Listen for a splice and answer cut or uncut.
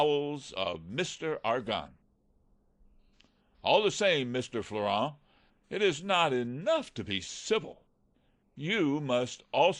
uncut